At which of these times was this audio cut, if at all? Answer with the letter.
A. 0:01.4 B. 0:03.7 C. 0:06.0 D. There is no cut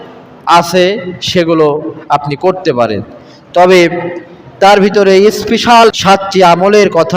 C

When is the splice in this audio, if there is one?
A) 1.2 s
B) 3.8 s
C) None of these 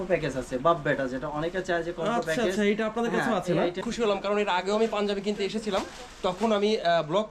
B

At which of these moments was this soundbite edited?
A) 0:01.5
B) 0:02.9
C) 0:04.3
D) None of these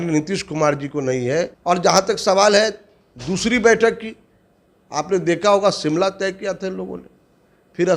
A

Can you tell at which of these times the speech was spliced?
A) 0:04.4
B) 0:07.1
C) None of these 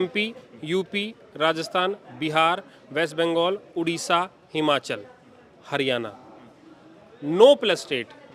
C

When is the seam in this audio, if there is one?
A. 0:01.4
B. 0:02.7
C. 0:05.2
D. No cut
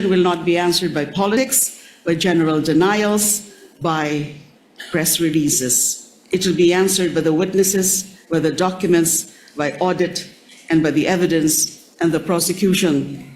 A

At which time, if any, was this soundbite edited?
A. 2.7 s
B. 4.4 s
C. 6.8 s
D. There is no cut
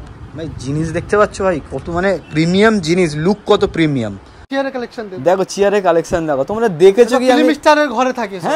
B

